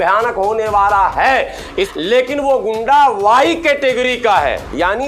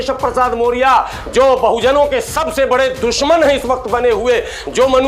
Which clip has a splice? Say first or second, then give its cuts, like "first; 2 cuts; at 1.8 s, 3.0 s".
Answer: first; 1 cut; at 1.9 s